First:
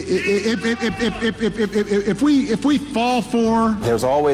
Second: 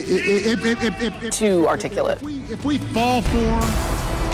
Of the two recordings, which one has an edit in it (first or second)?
first